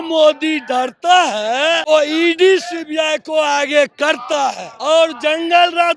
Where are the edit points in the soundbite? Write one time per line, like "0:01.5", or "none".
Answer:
0:01.8
0:04.7